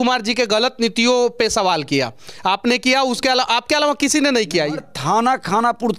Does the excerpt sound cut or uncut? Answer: cut